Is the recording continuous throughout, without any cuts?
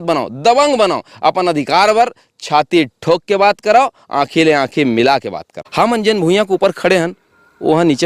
no; 1 cut; at 5.6 s

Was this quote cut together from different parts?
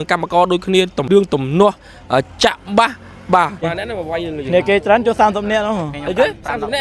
yes; 2 cuts; at 1.1 s, 3.6 s

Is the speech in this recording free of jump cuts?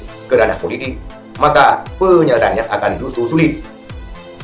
yes; 0 cuts

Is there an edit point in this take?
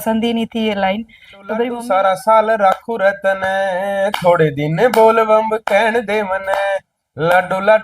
yes; 1 cut; at 1.7 s

